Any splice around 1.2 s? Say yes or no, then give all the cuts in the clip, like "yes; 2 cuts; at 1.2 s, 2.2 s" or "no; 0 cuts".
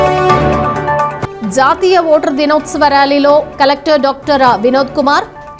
yes; 1 cut; at 1.2 s